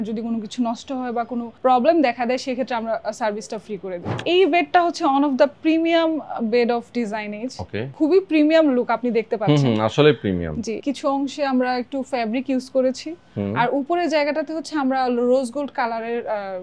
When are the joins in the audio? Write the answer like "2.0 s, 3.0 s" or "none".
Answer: 4.2 s, 7.8 s, 10.8 s